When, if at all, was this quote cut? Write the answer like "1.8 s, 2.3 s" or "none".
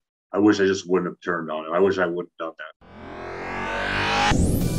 2.7 s